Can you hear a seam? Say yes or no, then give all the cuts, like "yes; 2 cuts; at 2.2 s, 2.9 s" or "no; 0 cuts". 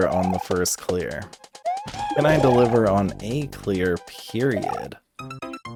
no; 0 cuts